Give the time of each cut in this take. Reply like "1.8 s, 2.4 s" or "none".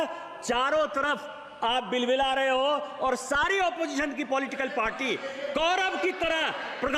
none